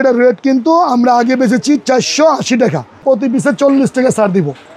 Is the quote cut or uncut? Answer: cut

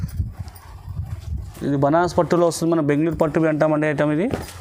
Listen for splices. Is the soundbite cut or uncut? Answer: uncut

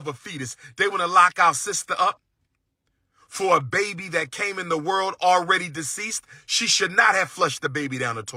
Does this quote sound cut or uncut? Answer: uncut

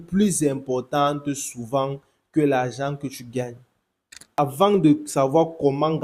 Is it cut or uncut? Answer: cut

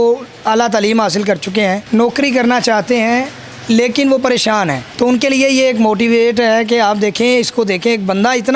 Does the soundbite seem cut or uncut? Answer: cut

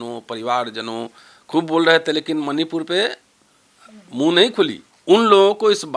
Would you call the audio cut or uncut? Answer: cut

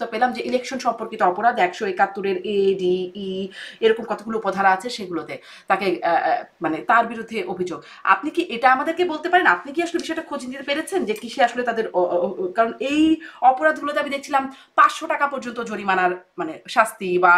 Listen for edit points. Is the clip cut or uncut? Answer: uncut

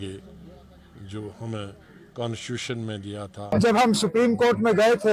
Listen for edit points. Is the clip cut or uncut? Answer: uncut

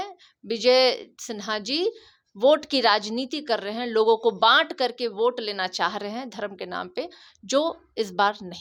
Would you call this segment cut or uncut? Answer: uncut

